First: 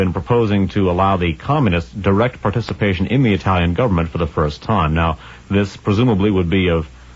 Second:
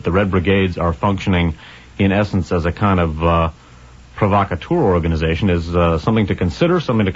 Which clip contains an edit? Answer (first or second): first